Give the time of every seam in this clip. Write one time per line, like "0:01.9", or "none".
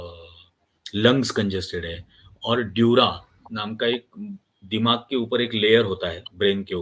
none